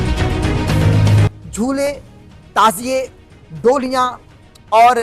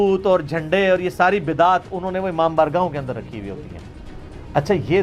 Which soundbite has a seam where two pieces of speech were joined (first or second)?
first